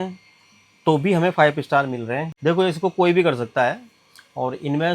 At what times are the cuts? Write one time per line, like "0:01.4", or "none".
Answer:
0:02.3